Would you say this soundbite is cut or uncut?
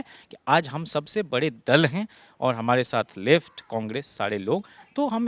uncut